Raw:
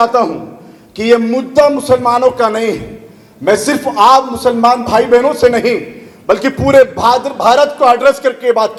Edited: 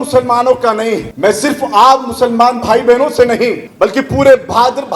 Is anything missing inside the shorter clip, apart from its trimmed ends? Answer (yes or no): yes